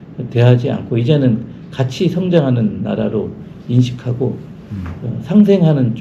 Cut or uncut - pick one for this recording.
uncut